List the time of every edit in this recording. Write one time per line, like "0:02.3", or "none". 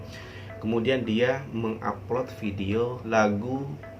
0:03.0